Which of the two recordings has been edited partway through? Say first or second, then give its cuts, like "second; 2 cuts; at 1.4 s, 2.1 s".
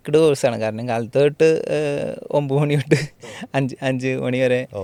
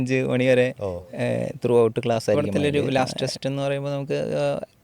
second; 1 cut; at 2.4 s